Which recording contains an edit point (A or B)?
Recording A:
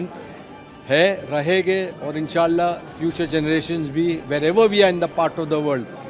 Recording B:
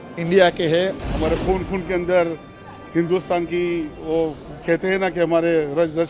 B